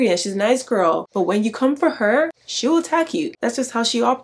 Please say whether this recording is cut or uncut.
uncut